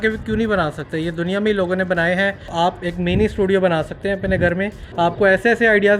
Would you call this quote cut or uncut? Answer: cut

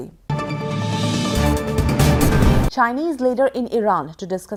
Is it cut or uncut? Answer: uncut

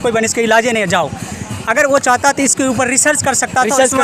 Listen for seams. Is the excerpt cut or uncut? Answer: uncut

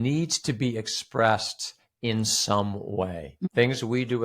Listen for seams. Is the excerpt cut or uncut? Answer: cut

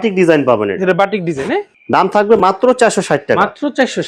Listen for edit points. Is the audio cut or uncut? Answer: uncut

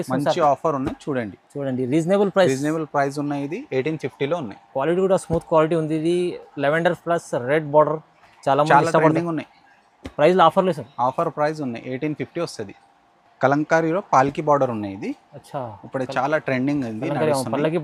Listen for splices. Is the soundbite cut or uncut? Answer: uncut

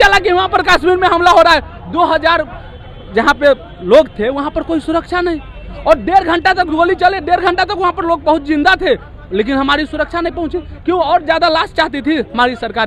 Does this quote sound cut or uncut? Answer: uncut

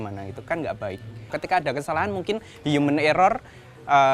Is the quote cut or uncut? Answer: cut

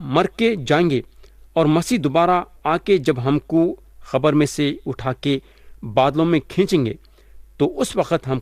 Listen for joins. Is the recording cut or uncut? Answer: uncut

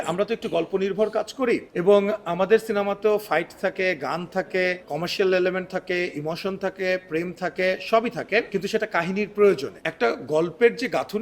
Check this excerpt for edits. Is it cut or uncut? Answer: cut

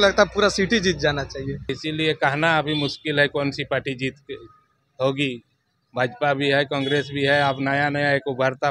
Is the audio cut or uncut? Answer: cut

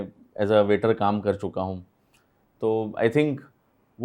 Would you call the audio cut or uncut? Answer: uncut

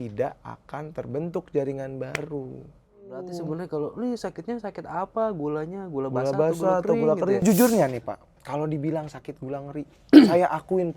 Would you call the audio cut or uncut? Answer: cut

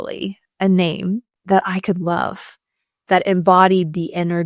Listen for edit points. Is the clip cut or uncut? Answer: cut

